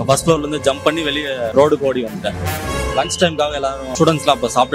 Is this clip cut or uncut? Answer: cut